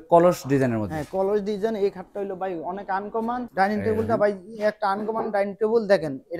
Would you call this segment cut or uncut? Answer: cut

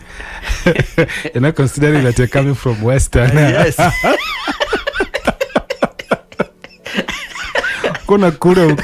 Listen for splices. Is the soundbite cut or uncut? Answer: uncut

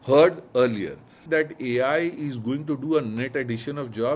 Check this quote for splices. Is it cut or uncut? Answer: cut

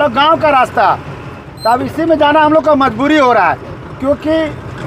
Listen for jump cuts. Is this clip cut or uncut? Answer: uncut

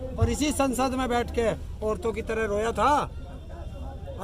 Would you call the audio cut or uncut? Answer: uncut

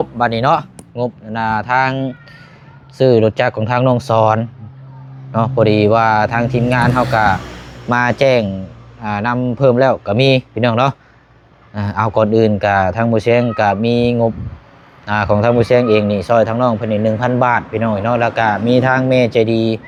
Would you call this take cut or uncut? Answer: uncut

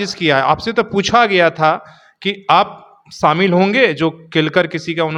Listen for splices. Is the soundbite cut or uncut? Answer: uncut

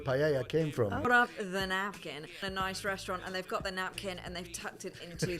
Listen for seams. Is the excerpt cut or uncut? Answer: cut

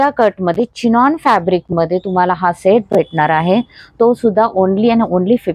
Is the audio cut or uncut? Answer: uncut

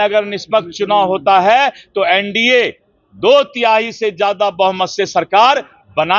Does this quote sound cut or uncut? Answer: uncut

